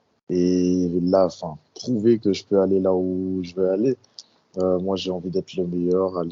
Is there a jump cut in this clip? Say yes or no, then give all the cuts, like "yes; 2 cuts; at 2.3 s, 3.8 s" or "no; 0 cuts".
no; 0 cuts